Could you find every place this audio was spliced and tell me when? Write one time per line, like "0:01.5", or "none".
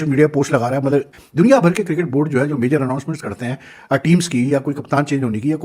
0:01.2